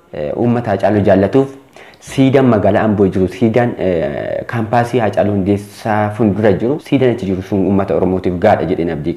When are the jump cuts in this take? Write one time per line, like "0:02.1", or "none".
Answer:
0:06.8